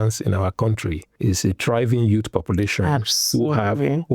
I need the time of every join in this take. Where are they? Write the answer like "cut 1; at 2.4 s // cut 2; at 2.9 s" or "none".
cut 1; at 1.1 s